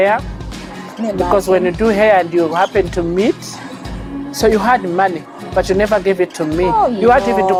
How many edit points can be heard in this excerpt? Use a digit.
0